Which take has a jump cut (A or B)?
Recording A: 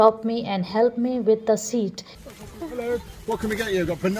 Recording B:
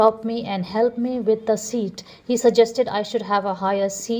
A